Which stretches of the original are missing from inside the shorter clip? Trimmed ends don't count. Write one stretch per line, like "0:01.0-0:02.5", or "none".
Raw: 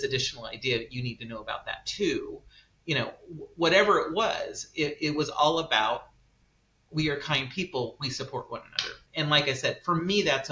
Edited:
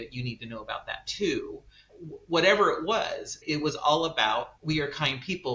0:02.7-0:03.2
0:04.7-0:04.9
0:06.1-0:06.8